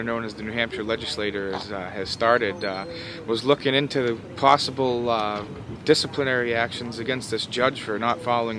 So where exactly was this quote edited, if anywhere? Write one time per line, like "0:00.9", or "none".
none